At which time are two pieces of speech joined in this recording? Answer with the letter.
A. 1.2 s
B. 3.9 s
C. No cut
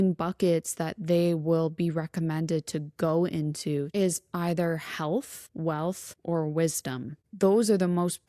B